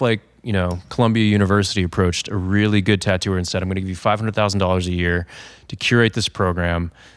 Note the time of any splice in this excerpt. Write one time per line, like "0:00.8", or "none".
none